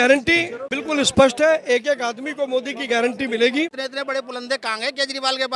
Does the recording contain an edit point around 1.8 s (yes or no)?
no